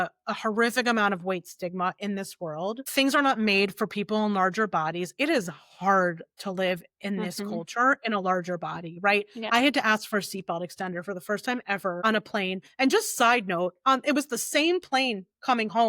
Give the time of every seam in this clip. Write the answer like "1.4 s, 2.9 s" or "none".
2.8 s, 12.0 s